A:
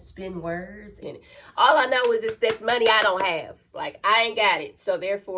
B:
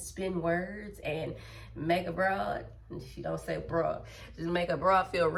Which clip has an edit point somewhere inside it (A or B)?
A